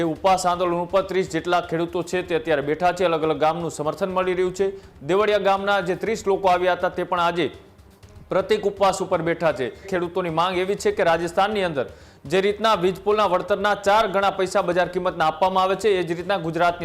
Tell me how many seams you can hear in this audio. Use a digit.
1